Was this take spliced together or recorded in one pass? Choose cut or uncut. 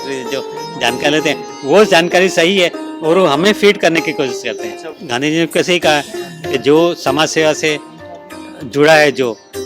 cut